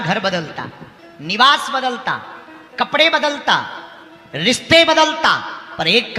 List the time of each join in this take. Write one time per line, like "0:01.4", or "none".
none